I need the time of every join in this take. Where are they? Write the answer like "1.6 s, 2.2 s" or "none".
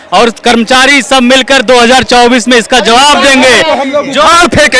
none